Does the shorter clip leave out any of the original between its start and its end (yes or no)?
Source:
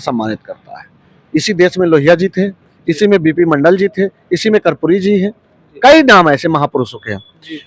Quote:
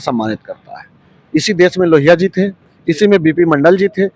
no